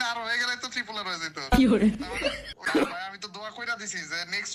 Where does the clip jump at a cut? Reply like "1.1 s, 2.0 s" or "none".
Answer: 2.8 s